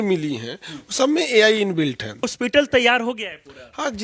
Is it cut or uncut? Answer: cut